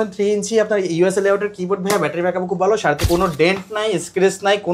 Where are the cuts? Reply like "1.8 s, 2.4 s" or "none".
3.0 s